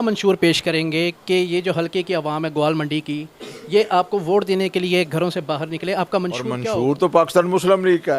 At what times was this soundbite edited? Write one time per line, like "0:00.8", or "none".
0:06.6